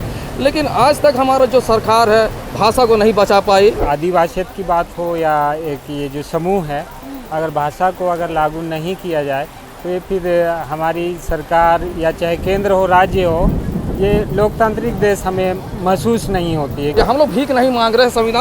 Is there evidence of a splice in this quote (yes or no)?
yes